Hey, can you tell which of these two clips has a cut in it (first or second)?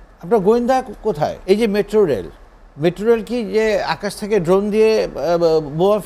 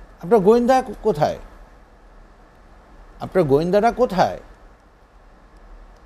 first